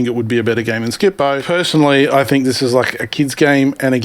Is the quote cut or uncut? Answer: cut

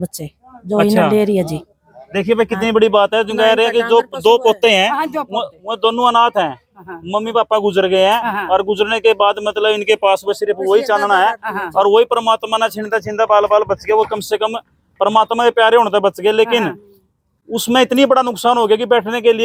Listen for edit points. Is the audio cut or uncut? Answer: uncut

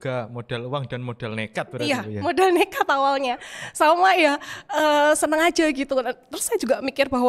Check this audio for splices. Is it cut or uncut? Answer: uncut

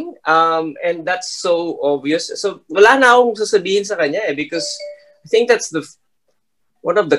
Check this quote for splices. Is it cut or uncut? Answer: uncut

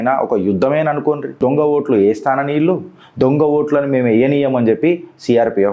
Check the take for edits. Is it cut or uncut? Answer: uncut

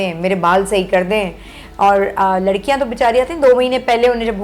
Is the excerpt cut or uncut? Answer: uncut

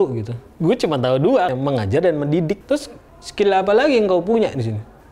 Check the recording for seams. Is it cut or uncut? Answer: cut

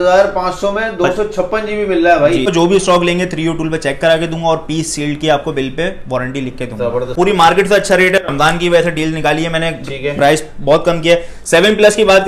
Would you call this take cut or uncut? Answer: cut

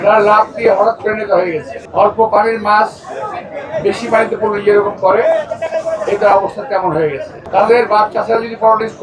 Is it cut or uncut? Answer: cut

